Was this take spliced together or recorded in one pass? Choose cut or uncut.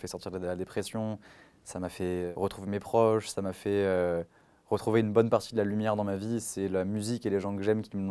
cut